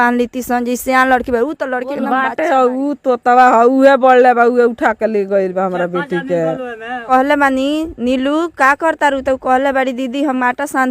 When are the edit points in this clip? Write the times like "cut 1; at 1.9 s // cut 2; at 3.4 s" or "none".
cut 1; at 2.0 s // cut 2; at 7.0 s